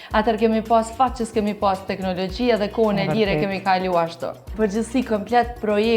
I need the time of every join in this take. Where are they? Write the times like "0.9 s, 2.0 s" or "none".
4.5 s